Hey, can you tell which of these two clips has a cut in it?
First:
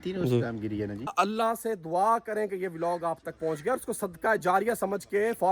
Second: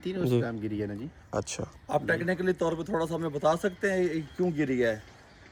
first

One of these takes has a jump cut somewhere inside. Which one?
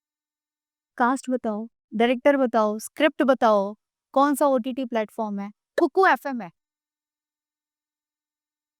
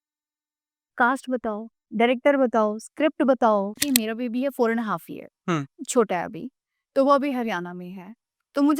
second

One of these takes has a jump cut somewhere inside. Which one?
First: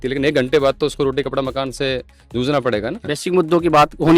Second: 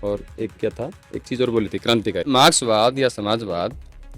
second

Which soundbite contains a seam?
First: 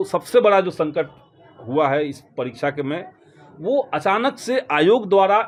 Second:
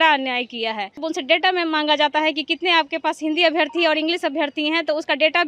second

